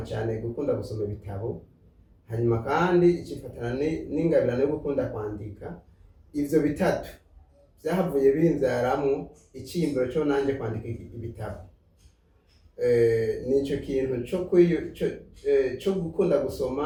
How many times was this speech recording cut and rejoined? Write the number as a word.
zero